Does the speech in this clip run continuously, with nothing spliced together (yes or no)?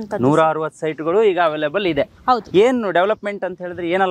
yes